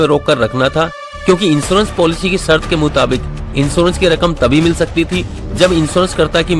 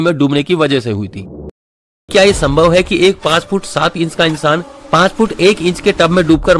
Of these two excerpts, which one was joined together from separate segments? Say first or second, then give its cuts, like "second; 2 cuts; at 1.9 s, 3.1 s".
second; 1 cut; at 1.8 s